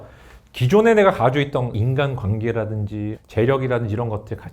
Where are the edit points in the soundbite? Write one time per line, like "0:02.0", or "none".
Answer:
0:01.7
0:03.2